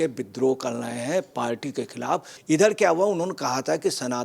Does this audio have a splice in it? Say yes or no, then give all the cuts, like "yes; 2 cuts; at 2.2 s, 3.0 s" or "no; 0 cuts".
yes; 1 cut; at 2.3 s